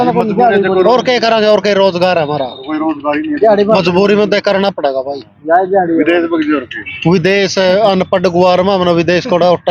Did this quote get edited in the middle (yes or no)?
no